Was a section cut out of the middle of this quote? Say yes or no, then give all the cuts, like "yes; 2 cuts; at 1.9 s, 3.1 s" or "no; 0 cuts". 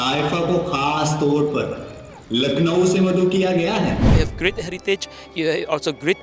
yes; 1 cut; at 4.1 s